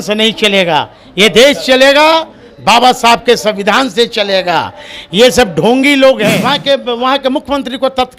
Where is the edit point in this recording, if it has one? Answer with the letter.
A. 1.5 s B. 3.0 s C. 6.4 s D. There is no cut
C